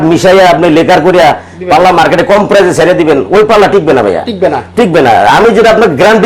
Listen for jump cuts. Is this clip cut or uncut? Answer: uncut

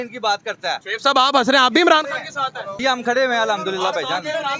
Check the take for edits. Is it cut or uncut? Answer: cut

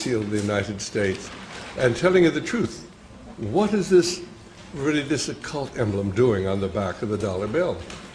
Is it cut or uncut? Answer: cut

